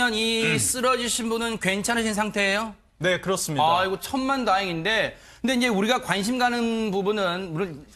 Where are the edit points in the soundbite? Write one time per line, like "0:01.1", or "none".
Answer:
none